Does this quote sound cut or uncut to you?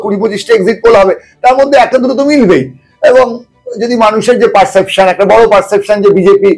uncut